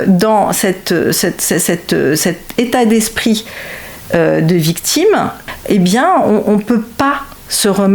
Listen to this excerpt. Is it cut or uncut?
cut